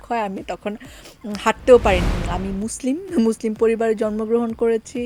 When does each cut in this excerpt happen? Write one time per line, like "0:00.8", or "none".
0:02.1

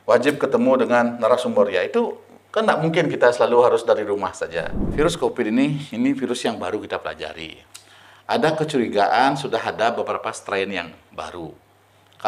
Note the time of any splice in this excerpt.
0:04.9

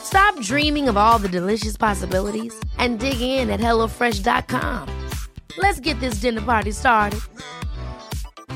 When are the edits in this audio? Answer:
none

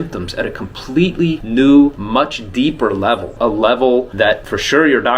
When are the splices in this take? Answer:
0:01.4
0:02.0
0:03.3
0:04.3

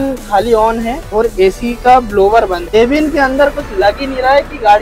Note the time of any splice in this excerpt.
0:01.0
0:02.7

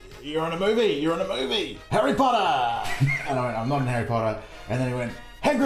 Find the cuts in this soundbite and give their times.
0:01.7
0:03.3

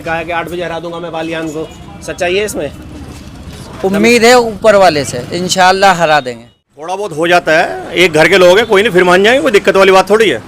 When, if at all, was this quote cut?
0:07.0

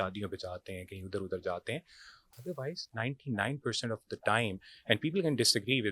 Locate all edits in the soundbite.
none

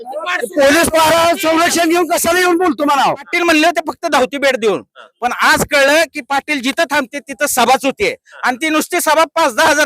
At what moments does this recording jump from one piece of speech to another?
0:03.3

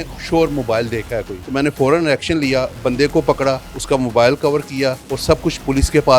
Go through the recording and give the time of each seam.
0:01.4
0:03.7
0:05.1

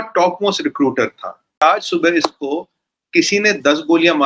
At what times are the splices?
0:01.6

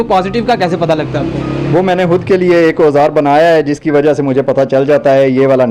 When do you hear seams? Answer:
none

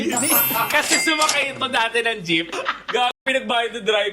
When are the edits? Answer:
0:02.5

